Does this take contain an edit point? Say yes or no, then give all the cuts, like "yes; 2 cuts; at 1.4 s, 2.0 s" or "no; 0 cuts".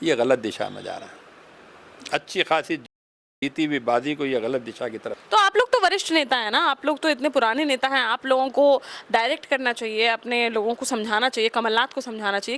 no; 0 cuts